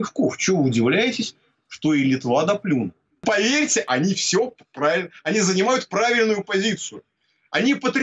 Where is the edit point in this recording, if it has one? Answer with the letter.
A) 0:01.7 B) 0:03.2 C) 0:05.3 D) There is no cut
B